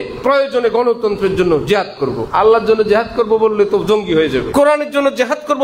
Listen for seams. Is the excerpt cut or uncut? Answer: cut